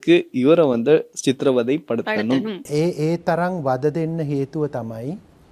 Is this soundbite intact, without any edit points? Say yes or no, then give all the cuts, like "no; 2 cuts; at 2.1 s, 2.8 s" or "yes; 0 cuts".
yes; 0 cuts